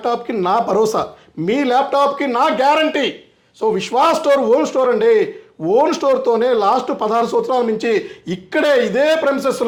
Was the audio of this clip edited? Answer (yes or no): no